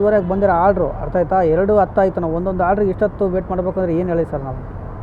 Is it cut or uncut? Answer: uncut